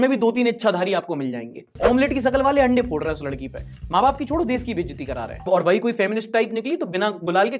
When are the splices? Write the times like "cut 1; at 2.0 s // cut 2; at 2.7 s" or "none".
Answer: cut 1; at 1.7 s // cut 2; at 5.3 s